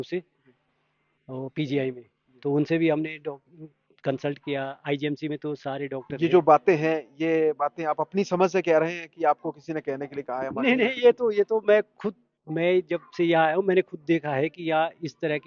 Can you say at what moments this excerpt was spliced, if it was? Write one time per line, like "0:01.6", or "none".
0:06.0